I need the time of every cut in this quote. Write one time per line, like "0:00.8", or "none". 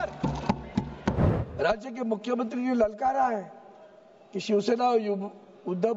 0:01.2